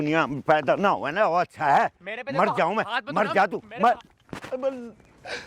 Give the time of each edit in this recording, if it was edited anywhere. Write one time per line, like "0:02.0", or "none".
none